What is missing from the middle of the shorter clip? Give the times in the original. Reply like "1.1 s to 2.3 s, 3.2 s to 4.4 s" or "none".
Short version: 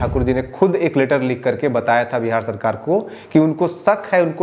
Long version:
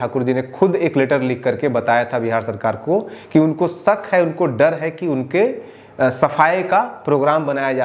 none

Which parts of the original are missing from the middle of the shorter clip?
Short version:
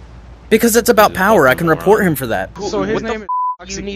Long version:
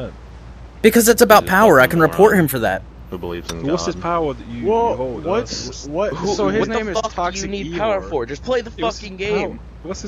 2.9 s to 6.2 s

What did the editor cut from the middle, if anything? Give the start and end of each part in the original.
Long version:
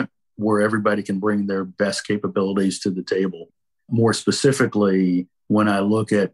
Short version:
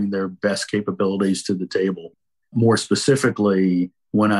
none

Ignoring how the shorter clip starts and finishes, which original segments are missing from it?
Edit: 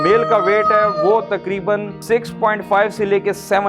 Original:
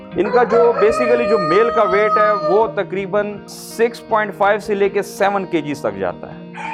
3.4 s to 3.6 s

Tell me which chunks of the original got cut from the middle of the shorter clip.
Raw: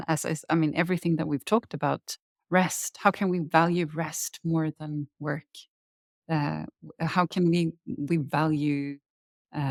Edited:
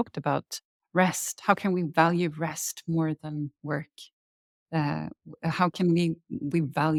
none

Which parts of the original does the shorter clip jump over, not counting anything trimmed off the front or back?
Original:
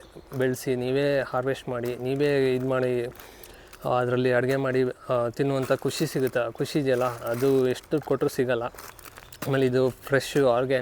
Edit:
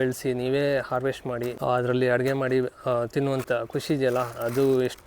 1.9 s to 3.7 s, 5.7 s to 6.3 s

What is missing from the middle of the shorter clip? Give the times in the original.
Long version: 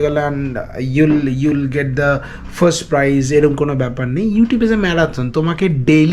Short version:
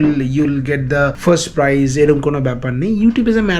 2.2 s to 2.5 s

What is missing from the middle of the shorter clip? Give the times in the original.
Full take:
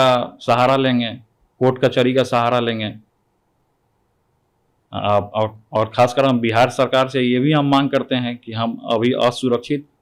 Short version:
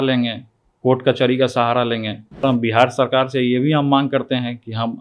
3.2 s to 6.2 s

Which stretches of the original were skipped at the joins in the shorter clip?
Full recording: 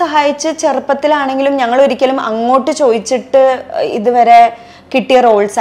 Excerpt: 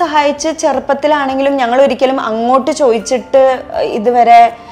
none

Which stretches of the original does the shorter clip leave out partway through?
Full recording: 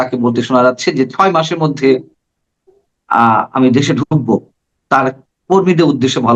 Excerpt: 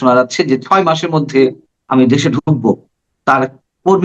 2.3 s to 3.5 s

